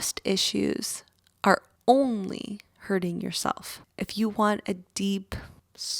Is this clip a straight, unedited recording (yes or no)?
yes